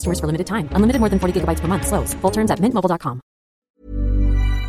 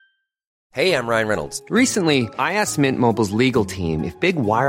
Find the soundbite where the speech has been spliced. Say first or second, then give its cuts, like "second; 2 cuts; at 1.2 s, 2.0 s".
first; 1 cut; at 3.7 s